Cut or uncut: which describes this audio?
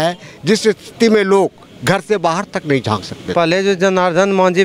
cut